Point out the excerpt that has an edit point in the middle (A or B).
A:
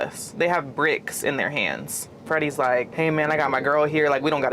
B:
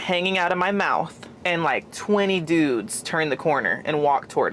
A